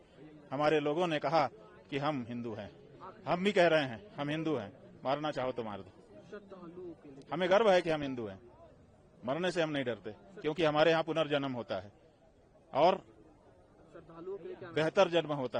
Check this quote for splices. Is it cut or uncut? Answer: uncut